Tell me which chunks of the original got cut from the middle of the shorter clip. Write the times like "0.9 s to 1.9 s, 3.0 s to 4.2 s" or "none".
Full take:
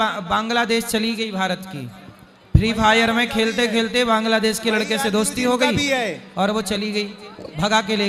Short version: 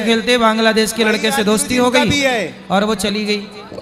none